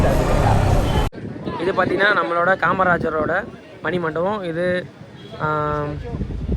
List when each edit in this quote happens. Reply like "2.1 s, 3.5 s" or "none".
1.1 s